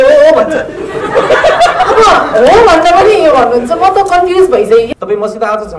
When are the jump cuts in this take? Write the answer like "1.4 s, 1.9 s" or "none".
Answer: 4.9 s